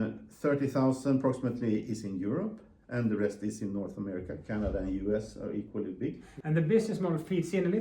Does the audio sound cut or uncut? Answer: cut